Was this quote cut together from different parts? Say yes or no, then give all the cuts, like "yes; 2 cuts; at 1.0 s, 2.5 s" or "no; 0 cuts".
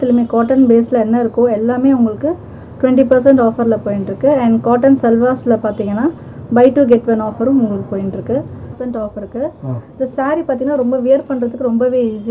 yes; 1 cut; at 8.7 s